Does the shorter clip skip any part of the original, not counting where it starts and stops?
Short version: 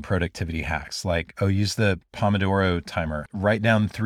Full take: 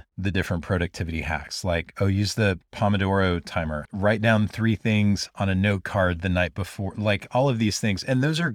no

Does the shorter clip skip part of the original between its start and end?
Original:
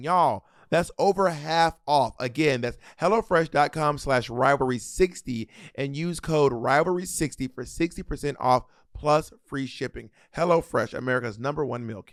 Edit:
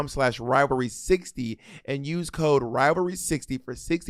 no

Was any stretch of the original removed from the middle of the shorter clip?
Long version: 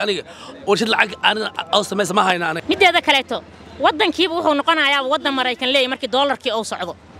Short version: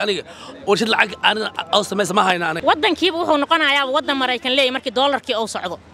yes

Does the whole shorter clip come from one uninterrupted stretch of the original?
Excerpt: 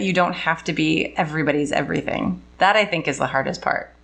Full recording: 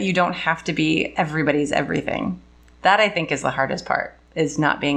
no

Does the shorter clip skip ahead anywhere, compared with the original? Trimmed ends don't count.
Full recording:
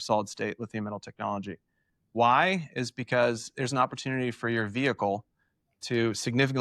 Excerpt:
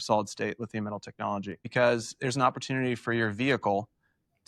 yes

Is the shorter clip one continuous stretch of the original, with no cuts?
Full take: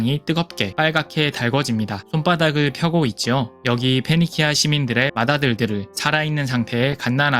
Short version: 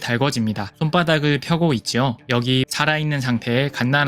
no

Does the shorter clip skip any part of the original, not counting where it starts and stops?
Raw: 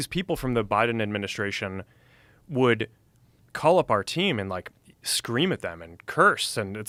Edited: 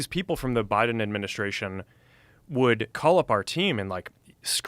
yes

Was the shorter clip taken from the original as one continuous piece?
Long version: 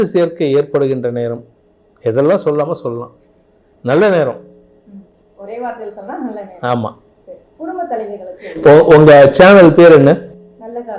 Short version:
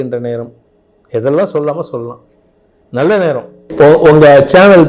no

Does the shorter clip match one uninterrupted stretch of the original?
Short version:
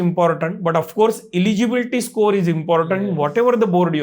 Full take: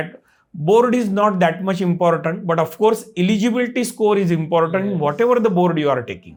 yes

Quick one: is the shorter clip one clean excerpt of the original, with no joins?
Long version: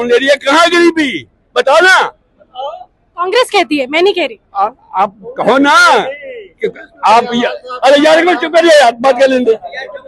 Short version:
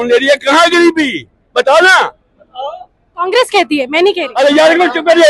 no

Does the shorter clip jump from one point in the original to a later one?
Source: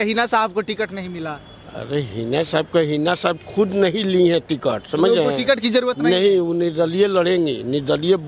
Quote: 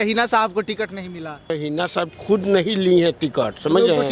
yes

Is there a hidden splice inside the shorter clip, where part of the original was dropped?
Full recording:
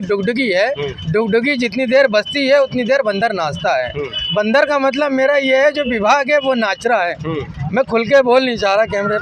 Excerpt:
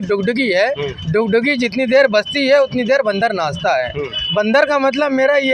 no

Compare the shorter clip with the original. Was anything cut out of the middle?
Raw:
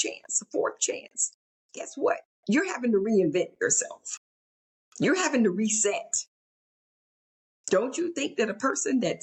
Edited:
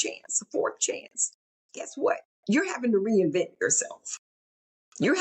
no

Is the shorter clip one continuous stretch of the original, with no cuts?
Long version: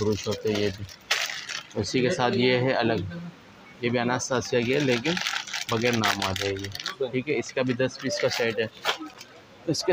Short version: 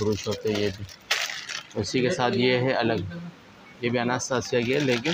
yes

